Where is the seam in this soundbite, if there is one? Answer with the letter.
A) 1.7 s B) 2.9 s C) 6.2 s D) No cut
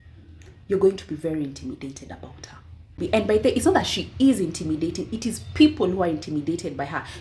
B